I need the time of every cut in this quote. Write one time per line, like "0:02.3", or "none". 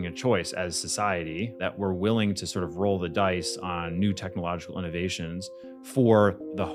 none